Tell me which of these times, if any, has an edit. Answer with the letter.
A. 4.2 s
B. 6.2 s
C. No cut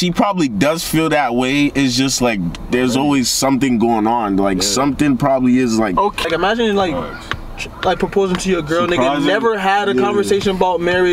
B